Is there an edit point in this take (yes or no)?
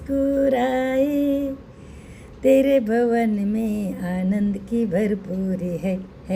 no